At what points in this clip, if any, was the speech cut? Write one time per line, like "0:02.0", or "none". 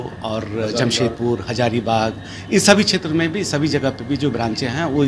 none

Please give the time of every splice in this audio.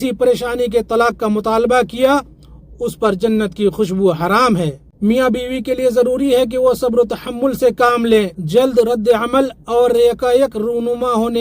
0:04.8
0:08.4

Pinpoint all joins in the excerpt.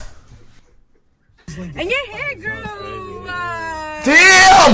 0:01.5

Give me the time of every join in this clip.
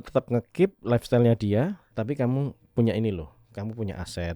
0:01.8

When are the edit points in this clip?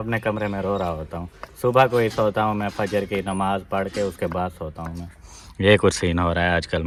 none

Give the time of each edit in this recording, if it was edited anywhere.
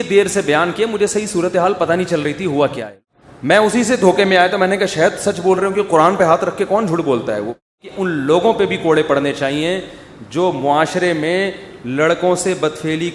0:02.9
0:07.7

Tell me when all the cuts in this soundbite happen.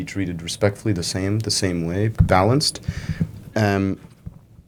none

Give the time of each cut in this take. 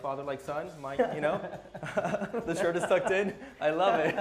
none

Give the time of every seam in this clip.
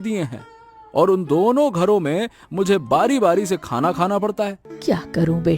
0:04.7

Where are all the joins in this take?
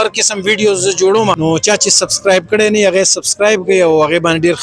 0:01.4

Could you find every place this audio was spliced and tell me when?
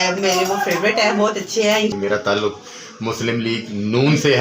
0:01.9

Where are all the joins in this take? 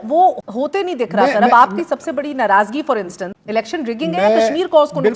0:03.3

